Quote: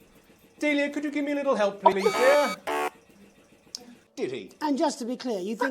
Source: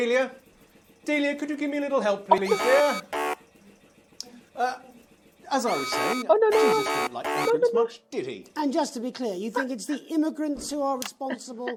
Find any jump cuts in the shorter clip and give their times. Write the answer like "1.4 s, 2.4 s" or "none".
4.0 s